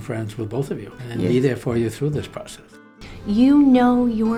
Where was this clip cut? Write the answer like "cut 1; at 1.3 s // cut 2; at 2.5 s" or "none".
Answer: cut 1; at 1.0 s // cut 2; at 2.9 s

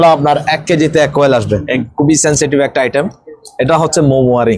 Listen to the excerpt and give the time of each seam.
cut 1; at 1.8 s

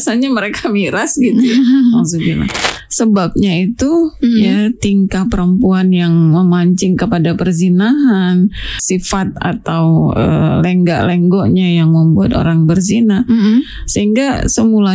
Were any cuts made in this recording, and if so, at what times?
cut 1; at 2.6 s // cut 2; at 8.8 s

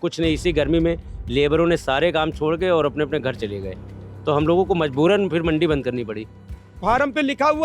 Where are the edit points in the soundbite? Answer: cut 1; at 6.7 s

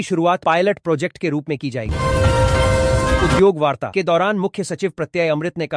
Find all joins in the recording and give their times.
cut 1; at 1.8 s // cut 2; at 3.0 s

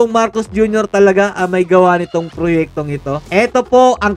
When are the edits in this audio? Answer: cut 1; at 3.2 s

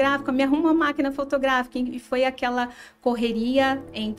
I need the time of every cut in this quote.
none

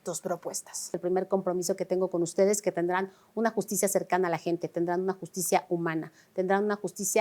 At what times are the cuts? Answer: cut 1; at 1.0 s

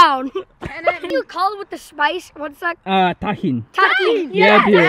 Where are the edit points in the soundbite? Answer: cut 1; at 1.1 s

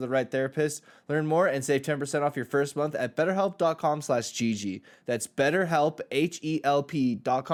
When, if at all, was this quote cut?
none

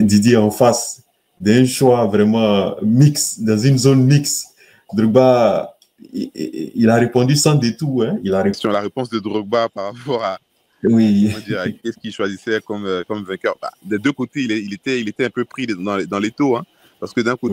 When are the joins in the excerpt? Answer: cut 1; at 8.6 s

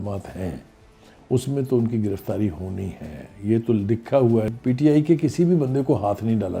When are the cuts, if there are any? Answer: cut 1; at 4.5 s

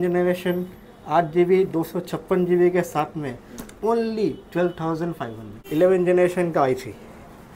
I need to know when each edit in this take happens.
cut 1; at 5.6 s

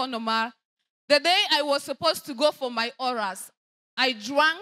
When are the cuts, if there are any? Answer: none

